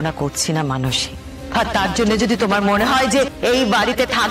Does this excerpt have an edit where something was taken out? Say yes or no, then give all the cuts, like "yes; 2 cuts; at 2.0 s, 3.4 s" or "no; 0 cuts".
yes; 1 cut; at 1.3 s